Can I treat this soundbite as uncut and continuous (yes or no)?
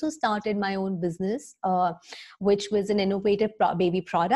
yes